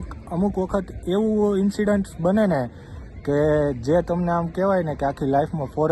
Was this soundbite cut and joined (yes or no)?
no